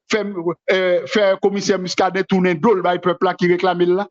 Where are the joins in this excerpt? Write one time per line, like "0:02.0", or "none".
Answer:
none

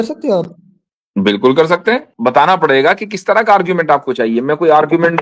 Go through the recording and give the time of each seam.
0:02.1

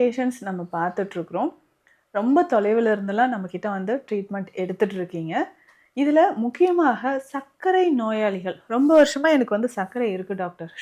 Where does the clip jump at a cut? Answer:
none

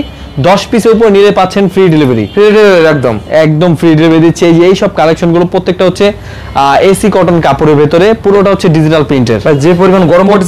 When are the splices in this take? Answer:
none

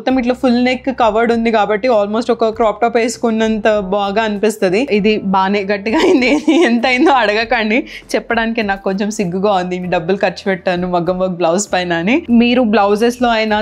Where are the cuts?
0:04.9
0:12.2

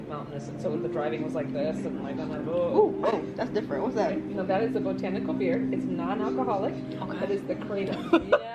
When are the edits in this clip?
none

